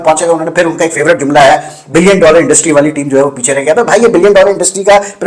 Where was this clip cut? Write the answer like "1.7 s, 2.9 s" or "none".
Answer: none